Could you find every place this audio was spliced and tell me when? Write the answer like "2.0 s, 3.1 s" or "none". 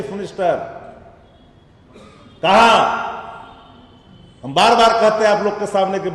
none